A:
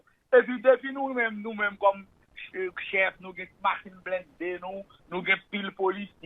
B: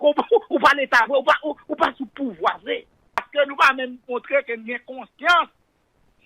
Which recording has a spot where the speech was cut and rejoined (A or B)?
B